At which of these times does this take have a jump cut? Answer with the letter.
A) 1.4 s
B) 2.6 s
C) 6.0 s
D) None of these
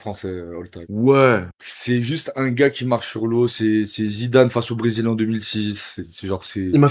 D